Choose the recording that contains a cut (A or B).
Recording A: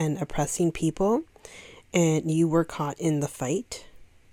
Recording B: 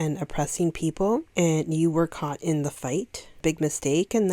B